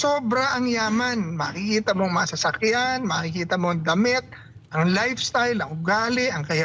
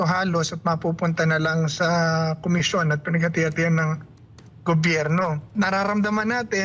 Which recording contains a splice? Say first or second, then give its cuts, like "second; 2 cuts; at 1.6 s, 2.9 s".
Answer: second; 1 cut; at 5.5 s